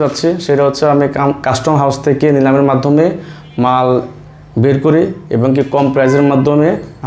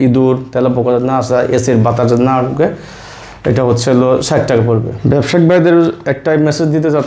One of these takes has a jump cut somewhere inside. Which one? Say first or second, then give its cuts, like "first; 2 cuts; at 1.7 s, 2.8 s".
second; 1 cut; at 4.9 s